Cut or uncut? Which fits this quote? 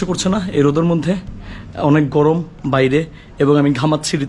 uncut